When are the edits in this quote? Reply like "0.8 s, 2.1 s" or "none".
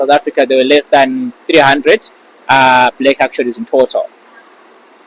none